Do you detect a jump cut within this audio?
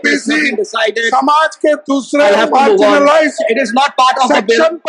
no; 0 cuts

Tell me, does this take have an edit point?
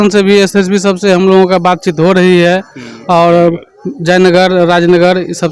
no; 0 cuts

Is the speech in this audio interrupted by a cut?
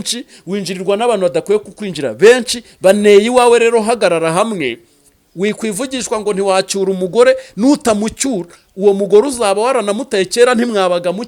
no; 0 cuts

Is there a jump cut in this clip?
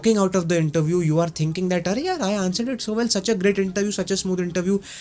no; 0 cuts

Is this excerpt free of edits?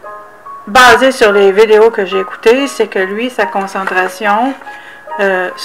no; 1 cut; at 2.1 s

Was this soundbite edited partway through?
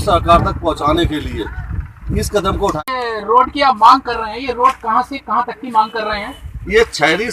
yes; 1 cut; at 2.8 s

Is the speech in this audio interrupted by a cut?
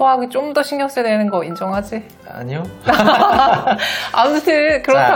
no; 0 cuts

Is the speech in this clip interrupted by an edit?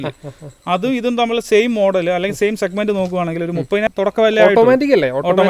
yes; 1 cut; at 3.9 s

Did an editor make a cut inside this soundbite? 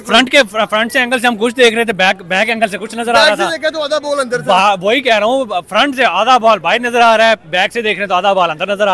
no; 0 cuts

